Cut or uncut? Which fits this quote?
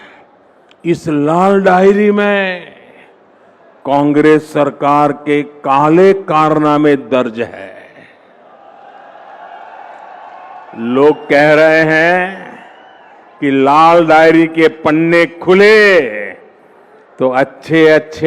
uncut